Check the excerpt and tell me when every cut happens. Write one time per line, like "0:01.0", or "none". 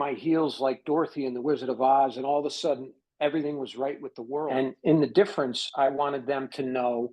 0:04.5